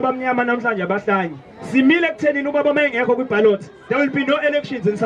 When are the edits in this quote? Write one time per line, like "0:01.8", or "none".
none